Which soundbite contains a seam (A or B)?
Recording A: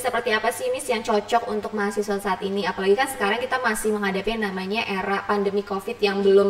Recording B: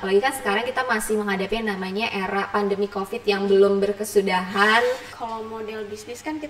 B